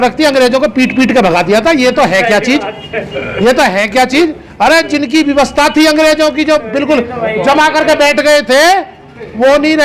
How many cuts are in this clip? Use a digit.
0